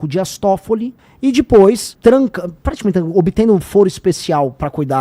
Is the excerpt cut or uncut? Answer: cut